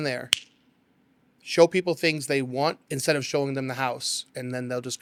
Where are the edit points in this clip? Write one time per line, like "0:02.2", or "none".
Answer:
none

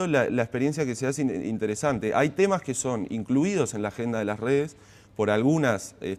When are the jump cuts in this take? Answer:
0:02.5

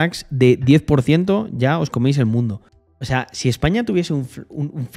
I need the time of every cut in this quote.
none

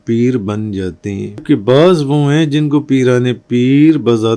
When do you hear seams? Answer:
0:01.4

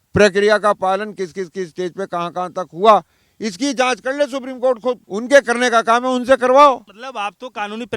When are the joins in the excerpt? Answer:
none

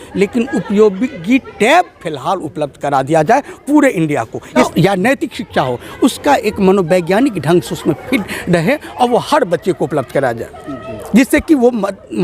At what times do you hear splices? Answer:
0:04.7

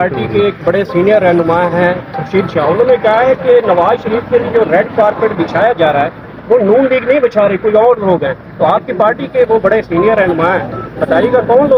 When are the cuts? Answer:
none

